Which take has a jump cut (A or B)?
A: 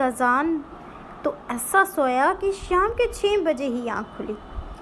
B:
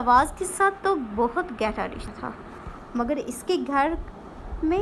B